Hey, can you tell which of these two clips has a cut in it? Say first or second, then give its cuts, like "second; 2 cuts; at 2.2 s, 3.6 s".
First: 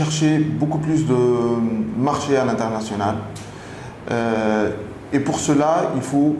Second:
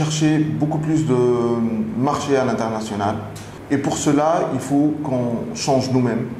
second; 1 cut; at 3.5 s